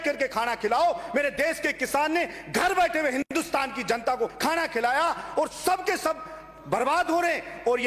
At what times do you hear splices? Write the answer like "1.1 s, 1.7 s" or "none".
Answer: none

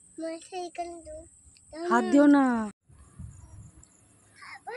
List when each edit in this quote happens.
3.3 s

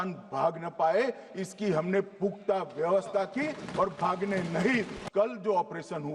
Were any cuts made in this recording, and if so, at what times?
5.0 s

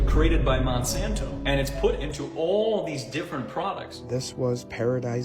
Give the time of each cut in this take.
3.9 s

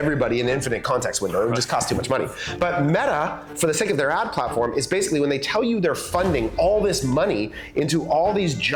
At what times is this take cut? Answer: none

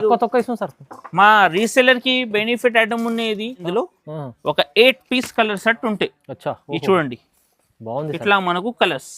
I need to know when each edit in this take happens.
3.6 s

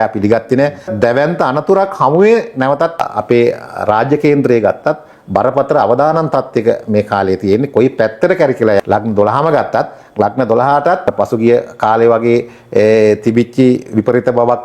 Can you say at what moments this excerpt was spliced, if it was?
0.9 s, 3.0 s, 8.8 s, 11.1 s

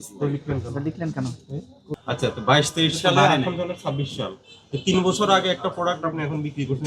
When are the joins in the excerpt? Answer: 2.0 s

